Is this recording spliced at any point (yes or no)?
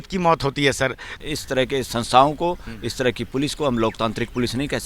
yes